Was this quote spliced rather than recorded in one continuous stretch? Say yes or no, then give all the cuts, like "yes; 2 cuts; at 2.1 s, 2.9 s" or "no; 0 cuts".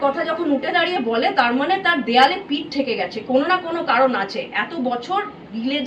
no; 0 cuts